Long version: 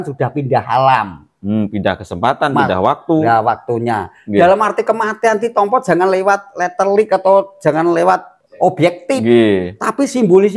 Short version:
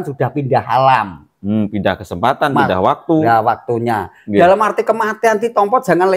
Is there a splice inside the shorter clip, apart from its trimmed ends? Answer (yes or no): no